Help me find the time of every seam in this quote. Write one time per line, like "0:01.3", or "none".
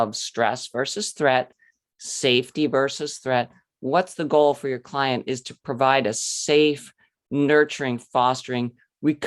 none

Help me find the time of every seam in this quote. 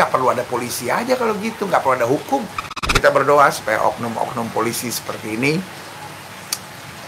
0:02.8

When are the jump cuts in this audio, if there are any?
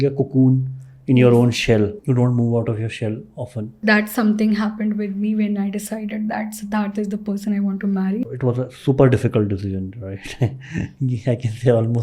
0:03.7
0:08.2

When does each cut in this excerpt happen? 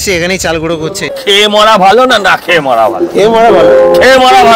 0:01.1

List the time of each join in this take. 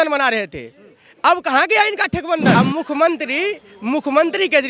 0:02.5

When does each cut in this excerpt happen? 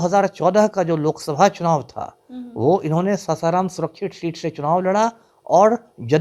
none

